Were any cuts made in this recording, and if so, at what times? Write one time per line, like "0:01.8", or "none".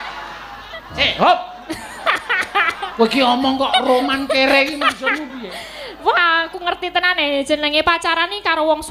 0:01.0